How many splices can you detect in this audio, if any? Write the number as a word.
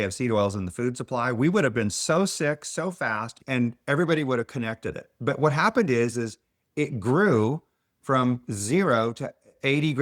one